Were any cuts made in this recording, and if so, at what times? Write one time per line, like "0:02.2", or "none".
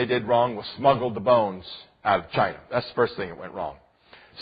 0:02.1